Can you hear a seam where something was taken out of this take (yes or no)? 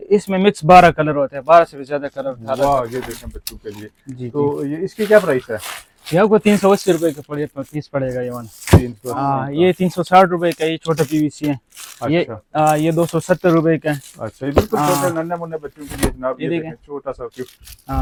no